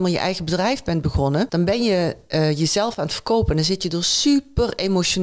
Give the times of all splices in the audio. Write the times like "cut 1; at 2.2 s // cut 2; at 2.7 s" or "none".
cut 1; at 1.5 s